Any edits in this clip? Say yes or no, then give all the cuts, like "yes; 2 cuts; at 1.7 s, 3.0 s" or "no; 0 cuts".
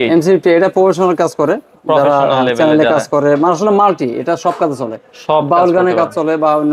no; 0 cuts